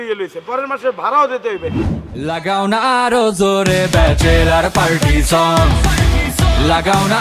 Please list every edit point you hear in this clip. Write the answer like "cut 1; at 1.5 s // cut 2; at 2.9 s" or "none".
cut 1; at 2.1 s